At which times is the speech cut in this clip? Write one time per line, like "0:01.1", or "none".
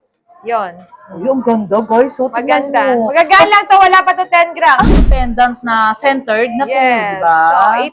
0:04.9